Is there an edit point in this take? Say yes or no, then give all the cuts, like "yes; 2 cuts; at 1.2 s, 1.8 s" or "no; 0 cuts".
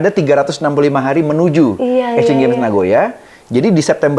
no; 0 cuts